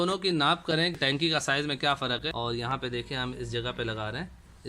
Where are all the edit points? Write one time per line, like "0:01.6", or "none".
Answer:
0:01.0
0:02.3